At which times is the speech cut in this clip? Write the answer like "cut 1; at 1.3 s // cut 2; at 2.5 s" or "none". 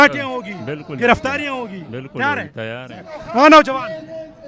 cut 1; at 3.2 s